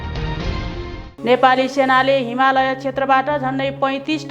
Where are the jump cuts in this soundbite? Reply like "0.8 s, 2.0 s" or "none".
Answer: 1.0 s